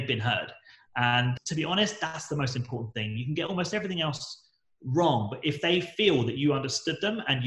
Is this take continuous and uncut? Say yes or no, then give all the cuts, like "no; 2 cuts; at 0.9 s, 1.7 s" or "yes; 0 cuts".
no; 1 cut; at 1.3 s